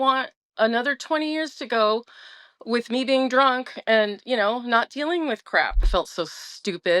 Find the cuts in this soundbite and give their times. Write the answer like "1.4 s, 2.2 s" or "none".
5.9 s